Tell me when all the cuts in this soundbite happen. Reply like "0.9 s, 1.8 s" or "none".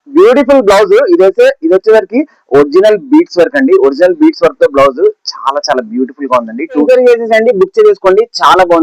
6.8 s